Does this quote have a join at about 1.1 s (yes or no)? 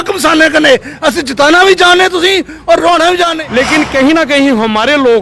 no